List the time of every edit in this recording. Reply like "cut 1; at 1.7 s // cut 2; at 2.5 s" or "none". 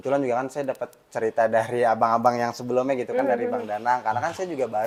none